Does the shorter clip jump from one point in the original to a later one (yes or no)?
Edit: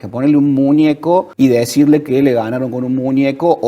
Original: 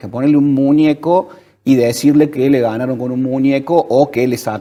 yes